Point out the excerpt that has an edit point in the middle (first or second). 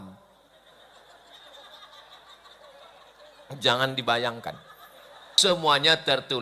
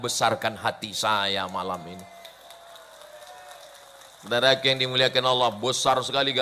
first